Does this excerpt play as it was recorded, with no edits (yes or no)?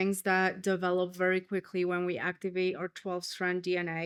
yes